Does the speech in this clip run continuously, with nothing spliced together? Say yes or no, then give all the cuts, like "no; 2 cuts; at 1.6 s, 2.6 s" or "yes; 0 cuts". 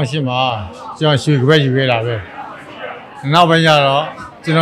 yes; 0 cuts